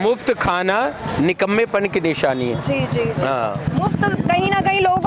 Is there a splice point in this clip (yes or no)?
no